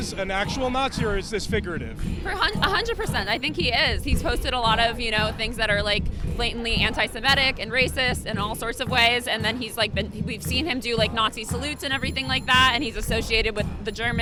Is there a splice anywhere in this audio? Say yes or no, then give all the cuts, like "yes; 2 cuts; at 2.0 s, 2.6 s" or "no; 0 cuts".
no; 0 cuts